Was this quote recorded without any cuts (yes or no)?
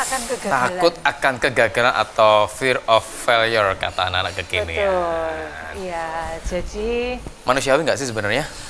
yes